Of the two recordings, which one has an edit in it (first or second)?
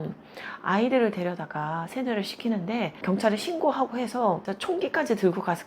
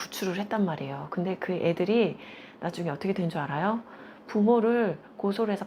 first